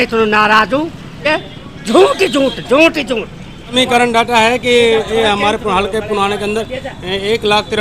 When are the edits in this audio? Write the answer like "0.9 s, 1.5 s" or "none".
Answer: 1.1 s, 3.7 s